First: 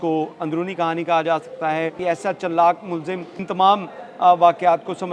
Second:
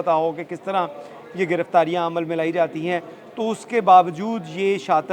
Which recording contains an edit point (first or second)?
first